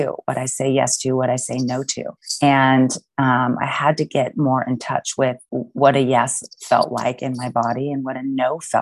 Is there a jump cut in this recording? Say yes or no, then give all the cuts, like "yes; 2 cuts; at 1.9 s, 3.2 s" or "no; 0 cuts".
yes; 1 cut; at 5.5 s